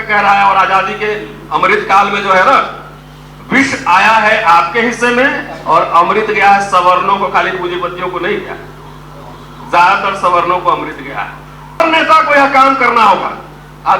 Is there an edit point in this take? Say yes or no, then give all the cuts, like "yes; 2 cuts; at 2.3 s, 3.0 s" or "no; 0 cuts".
yes; 1 cut; at 11.8 s